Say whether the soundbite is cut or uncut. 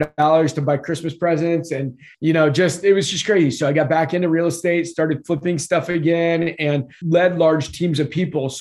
cut